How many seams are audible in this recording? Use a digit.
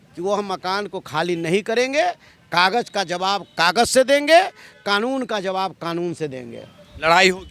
0